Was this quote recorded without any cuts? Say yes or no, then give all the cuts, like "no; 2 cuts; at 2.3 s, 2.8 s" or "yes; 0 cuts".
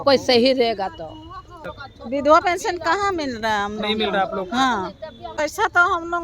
no; 2 cuts; at 1.6 s, 5.2 s